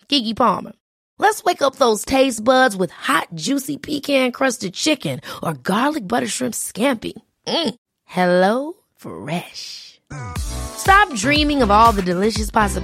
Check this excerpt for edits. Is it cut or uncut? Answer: uncut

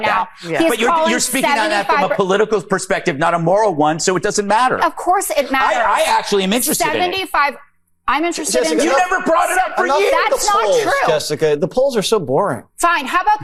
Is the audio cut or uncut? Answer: uncut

